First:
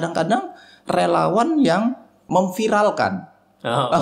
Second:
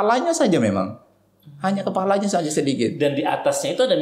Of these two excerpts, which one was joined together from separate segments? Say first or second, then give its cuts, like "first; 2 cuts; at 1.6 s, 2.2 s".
first; 1 cut; at 2.3 s